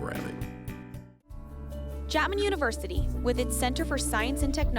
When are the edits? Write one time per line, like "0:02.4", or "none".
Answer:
0:01.2